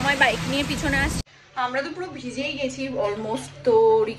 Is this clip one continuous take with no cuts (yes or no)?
no